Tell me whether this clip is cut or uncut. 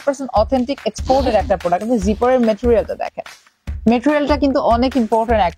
uncut